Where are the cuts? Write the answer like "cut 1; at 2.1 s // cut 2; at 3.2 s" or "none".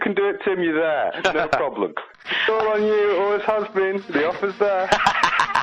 cut 1; at 2.3 s